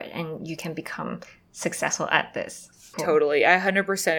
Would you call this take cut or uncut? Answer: cut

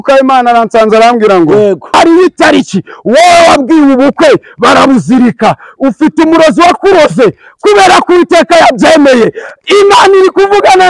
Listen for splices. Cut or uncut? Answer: cut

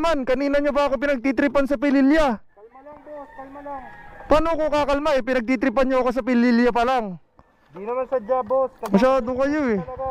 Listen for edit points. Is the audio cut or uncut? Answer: uncut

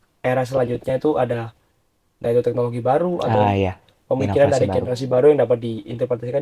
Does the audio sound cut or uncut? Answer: uncut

